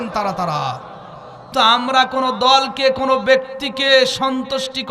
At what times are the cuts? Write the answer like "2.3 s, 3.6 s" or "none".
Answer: 1.5 s